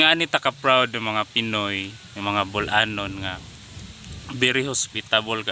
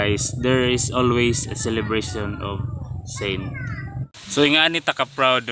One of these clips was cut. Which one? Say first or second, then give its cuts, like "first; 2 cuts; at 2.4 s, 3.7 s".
second; 1 cut; at 3.6 s